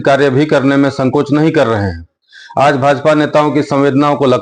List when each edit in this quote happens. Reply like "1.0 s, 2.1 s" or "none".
none